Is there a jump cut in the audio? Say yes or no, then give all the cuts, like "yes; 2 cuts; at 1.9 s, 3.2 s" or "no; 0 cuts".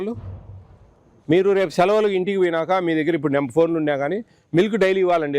no; 0 cuts